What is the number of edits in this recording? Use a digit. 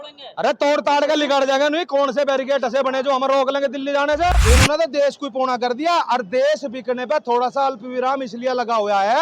1